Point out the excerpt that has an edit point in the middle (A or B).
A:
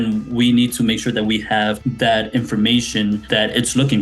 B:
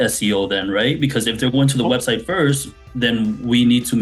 A